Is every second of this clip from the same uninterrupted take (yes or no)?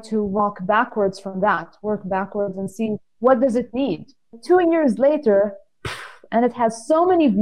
no